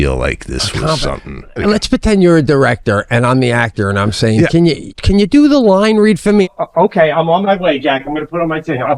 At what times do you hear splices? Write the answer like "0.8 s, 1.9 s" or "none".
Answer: 1.6 s, 4.9 s, 6.5 s